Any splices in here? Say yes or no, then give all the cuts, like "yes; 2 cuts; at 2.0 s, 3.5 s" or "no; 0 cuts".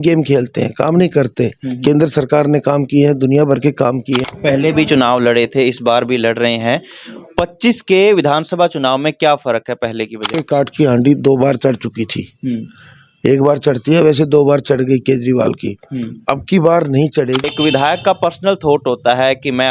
yes; 3 cuts; at 4.2 s, 10.4 s, 17.4 s